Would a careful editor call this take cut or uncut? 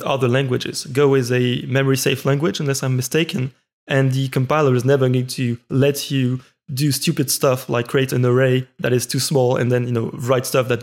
uncut